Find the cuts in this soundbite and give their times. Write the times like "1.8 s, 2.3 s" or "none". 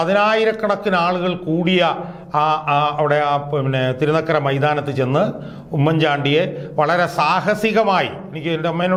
none